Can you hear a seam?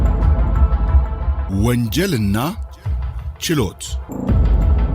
yes; 2 cuts; at 1.4 s, 4.0 s

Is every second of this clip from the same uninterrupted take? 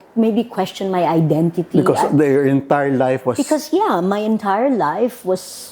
yes; 0 cuts

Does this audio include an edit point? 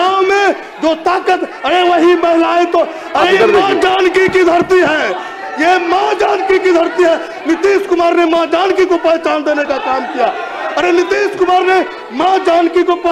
no; 0 cuts

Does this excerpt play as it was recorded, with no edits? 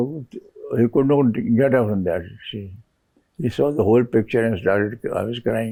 yes; 0 cuts

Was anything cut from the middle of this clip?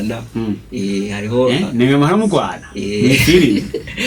no; 0 cuts

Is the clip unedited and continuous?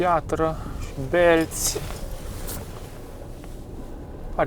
no; 1 cut; at 2.9 s

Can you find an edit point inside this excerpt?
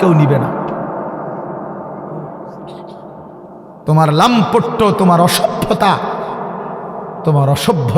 no; 0 cuts

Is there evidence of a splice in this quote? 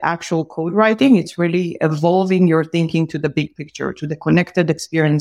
no; 0 cuts

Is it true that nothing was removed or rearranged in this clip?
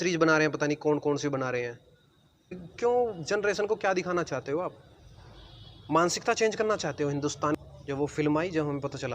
no; 2 cuts; at 2.7 s, 7.6 s

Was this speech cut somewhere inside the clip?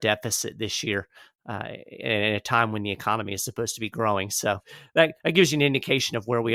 no; 0 cuts

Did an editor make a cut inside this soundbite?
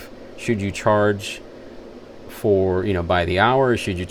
no; 0 cuts

